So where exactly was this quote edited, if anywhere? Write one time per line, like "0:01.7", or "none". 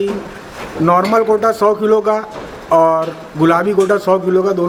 none